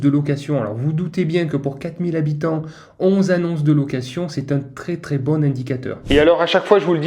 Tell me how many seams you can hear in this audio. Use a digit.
1